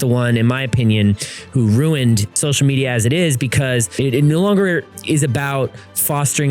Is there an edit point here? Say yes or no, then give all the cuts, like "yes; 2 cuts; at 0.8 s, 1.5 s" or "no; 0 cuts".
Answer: yes; 2 cuts; at 2.4 s, 3.9 s